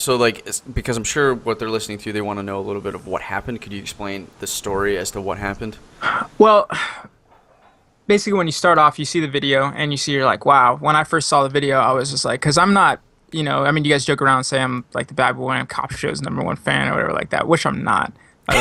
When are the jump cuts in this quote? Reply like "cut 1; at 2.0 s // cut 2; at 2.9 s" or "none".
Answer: none